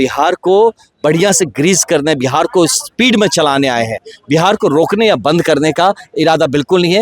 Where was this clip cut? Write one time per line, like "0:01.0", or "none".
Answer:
0:00.9

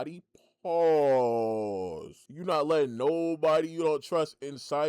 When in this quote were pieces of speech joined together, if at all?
0:02.2

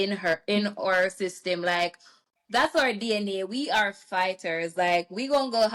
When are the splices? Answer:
none

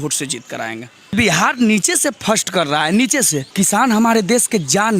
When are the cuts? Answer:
0:01.1
0:03.5

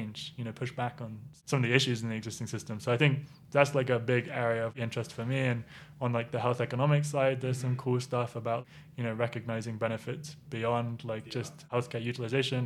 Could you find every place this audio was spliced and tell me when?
0:01.2
0:04.7
0:08.6
0:11.7

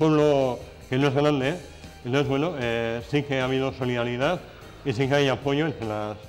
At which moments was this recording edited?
none

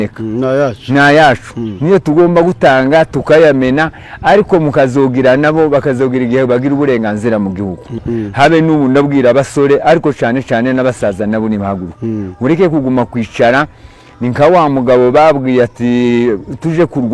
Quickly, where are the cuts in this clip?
0:08.0

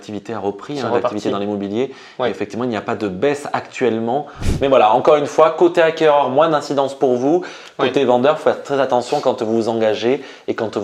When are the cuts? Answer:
0:04.4

